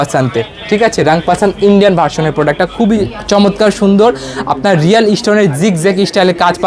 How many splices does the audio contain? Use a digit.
0